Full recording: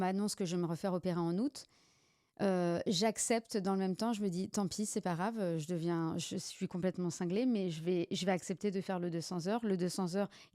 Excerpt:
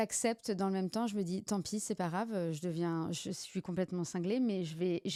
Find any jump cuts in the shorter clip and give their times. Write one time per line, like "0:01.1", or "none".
none